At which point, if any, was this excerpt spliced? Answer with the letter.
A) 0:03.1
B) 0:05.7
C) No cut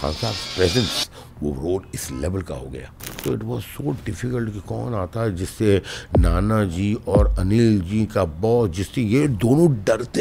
A